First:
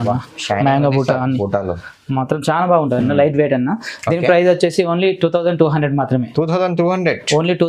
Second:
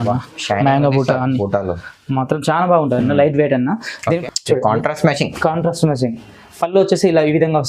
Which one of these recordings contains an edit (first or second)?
second